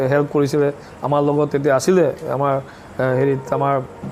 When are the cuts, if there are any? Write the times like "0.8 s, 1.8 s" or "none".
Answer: none